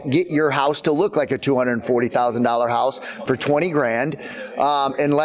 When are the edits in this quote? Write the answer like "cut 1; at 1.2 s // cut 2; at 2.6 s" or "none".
none